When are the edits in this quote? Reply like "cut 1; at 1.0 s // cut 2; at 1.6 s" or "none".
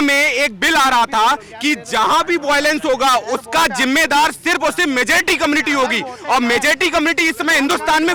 none